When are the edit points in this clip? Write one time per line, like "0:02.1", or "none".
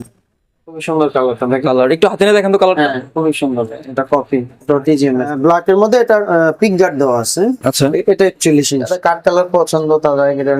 0:00.8
0:05.3
0:08.9